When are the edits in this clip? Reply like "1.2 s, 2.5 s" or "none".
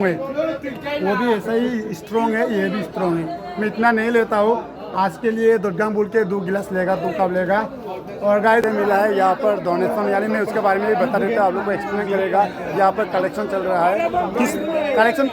8.6 s